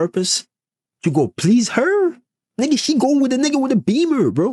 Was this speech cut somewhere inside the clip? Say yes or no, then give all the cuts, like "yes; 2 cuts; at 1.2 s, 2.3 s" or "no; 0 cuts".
no; 0 cuts